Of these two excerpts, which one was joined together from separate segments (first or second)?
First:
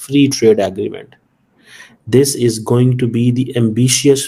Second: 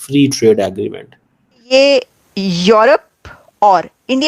second